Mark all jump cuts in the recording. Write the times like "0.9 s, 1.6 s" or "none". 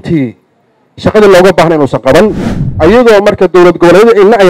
2.5 s